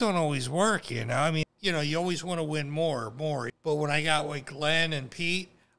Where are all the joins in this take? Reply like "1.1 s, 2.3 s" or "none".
1.4 s, 3.5 s

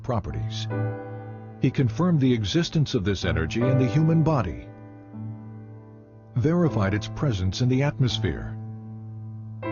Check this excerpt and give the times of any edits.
1.0 s

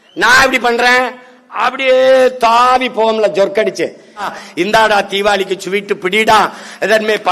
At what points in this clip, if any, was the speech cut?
4.3 s

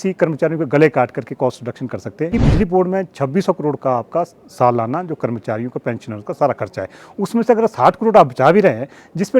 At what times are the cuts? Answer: 2.3 s

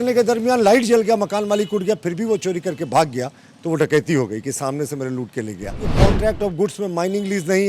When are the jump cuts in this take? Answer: 5.9 s

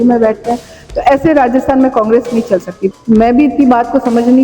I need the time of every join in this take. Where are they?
2.8 s

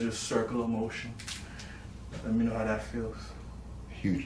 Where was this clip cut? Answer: none

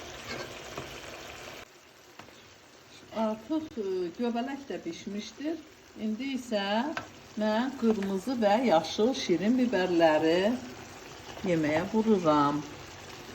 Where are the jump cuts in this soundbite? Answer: 1.6 s

